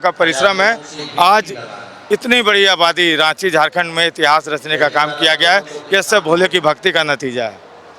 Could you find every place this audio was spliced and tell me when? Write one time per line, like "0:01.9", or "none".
none